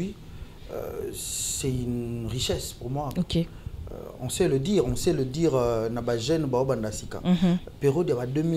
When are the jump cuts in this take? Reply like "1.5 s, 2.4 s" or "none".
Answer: none